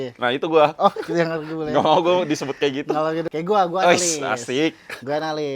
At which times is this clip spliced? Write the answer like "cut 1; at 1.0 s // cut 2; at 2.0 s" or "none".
cut 1; at 3.3 s